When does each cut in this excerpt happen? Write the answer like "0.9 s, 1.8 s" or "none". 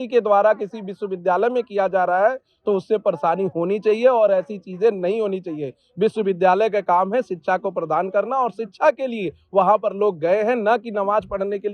none